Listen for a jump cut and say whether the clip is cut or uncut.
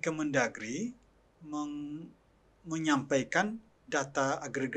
uncut